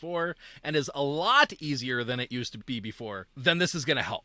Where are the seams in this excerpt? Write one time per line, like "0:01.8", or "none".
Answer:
0:03.3